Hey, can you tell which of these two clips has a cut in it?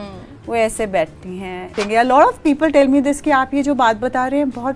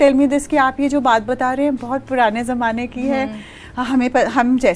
first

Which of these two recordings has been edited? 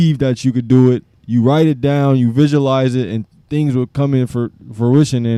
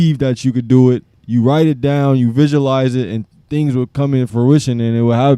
second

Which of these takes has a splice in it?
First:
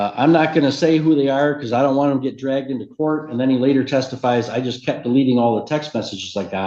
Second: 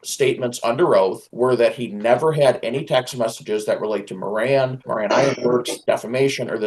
second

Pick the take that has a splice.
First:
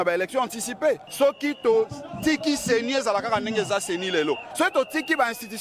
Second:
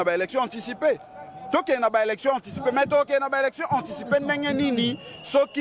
first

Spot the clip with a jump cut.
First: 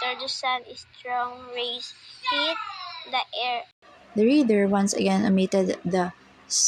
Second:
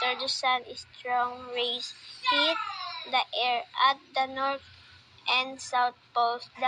second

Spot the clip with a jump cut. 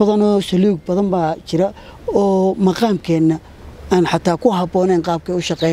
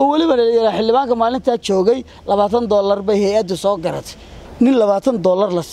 second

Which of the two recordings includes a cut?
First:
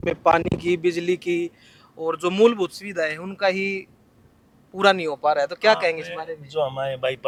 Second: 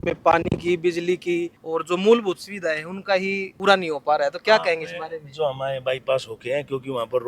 second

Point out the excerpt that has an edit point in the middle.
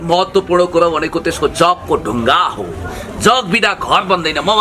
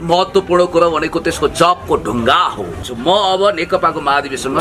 second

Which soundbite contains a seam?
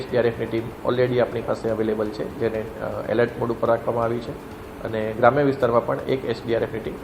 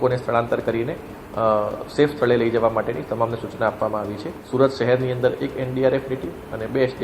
second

